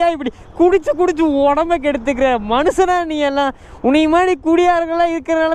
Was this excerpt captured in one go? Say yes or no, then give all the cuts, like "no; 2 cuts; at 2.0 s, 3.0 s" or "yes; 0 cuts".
yes; 0 cuts